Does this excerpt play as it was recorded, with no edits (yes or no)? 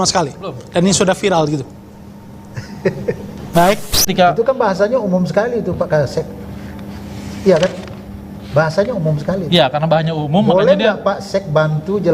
no